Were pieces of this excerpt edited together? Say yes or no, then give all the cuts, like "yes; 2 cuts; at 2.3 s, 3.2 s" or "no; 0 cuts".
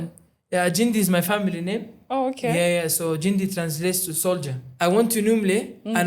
yes; 1 cut; at 4.6 s